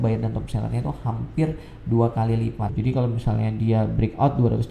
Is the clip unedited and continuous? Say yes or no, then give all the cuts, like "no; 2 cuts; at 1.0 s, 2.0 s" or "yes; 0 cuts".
no; 1 cut; at 2.7 s